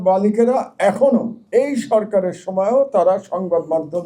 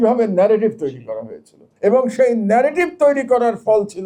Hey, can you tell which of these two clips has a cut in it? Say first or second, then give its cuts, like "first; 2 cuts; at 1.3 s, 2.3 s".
first; 1 cut; at 1.4 s